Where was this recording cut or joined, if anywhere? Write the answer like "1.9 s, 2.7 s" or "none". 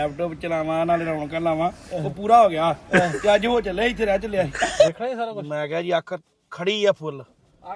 4.9 s